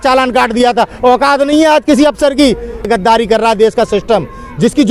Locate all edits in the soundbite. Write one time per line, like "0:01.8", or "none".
0:02.9